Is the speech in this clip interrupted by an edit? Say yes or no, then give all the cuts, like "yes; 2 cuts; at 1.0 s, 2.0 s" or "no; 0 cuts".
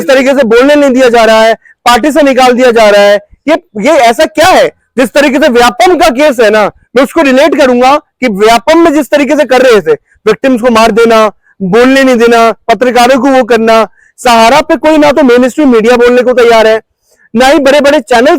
no; 0 cuts